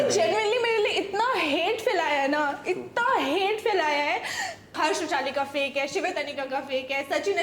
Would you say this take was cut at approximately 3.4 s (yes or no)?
no